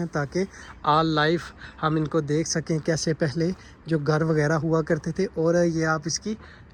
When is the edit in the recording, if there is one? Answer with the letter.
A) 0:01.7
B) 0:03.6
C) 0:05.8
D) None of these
D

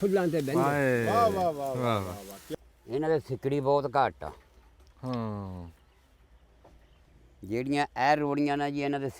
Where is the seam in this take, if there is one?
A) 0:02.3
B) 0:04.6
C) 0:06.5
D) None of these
A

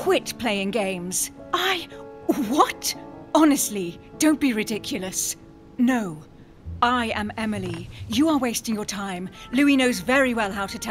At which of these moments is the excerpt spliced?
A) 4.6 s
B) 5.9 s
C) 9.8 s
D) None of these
D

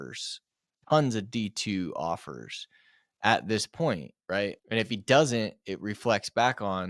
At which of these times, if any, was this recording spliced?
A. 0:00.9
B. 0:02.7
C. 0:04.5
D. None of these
C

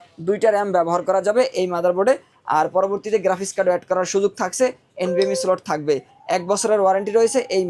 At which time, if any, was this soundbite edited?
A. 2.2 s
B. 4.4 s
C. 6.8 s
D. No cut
D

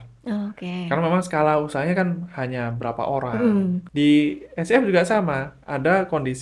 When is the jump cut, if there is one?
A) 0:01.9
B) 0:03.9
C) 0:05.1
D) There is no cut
B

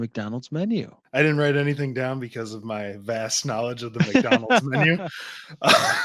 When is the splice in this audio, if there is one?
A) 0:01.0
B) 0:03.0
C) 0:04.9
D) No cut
A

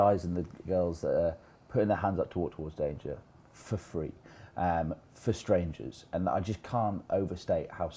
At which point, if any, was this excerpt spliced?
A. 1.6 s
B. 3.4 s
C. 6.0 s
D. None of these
D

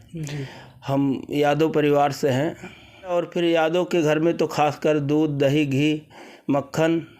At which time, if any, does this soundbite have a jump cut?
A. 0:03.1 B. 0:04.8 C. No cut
A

